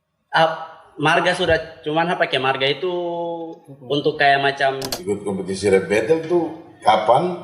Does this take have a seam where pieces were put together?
yes; 1 cut; at 4.9 s

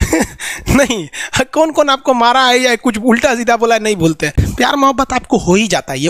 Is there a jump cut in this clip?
yes; 1 cut; at 4.4 s

